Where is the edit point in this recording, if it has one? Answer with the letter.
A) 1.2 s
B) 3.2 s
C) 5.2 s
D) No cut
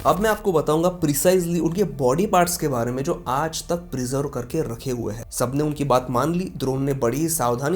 C